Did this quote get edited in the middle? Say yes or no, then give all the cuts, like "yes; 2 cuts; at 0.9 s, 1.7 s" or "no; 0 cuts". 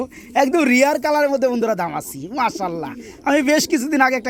no; 0 cuts